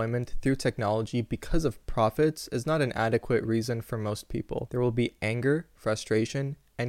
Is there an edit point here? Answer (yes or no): yes